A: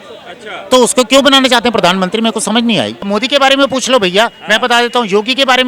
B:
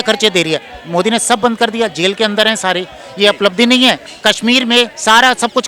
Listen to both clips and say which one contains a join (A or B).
A